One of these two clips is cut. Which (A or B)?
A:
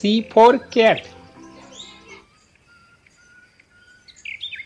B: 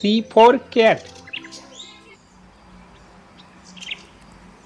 A